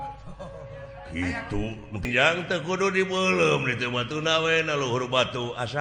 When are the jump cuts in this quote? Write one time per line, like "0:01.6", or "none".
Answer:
0:02.1